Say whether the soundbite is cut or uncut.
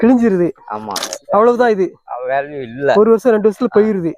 cut